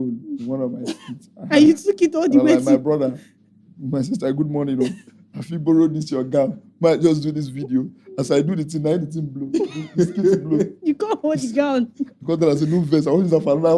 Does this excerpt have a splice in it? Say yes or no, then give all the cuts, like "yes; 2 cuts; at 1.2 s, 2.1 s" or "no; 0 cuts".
no; 0 cuts